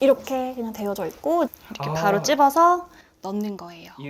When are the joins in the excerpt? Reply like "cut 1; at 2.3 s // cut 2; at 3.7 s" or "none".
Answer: cut 1; at 1.5 s